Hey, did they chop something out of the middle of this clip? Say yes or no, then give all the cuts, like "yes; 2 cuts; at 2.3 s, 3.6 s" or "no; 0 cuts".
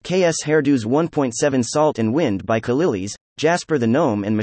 no; 0 cuts